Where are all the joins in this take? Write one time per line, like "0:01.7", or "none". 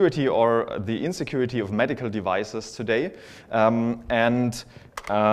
0:02.2